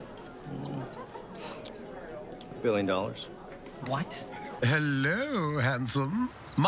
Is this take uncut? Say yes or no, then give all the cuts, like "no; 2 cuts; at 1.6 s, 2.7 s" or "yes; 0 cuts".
no; 1 cut; at 4.5 s